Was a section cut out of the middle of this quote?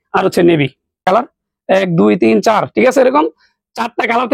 yes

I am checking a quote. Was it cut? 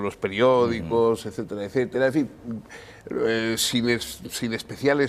yes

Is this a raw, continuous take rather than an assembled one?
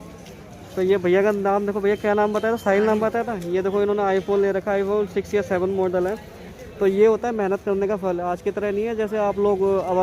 yes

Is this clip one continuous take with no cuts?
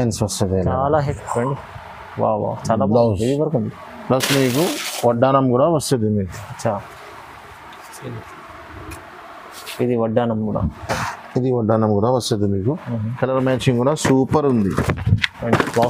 no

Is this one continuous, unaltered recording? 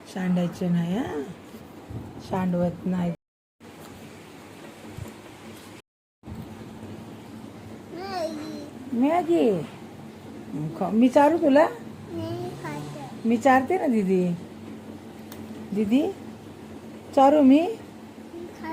no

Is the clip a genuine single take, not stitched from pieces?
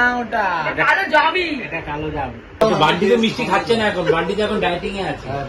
no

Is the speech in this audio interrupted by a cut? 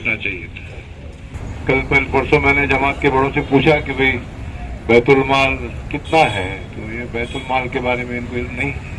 yes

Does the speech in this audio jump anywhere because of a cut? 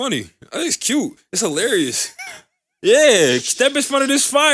no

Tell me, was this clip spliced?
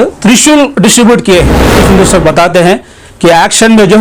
yes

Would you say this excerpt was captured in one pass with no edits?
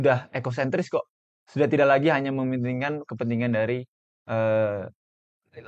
yes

